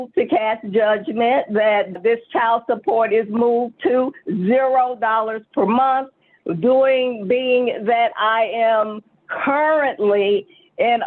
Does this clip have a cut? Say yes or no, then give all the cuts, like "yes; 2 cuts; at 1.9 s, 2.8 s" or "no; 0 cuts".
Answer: yes; 1 cut; at 1.9 s